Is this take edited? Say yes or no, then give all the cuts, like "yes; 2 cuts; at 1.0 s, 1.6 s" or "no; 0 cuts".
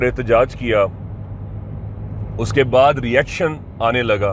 no; 0 cuts